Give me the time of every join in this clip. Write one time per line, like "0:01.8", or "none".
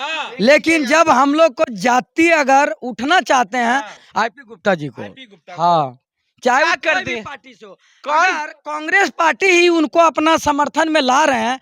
0:03.9